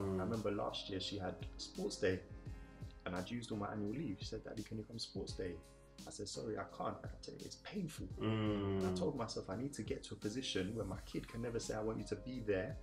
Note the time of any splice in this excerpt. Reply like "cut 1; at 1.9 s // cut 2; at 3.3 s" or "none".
none